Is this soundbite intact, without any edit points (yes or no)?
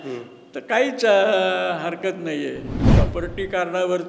no